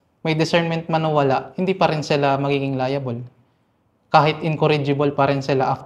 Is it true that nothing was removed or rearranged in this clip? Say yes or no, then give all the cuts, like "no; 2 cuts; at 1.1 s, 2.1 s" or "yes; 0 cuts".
yes; 0 cuts